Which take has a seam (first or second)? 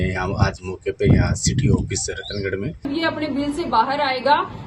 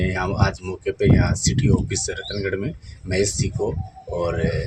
first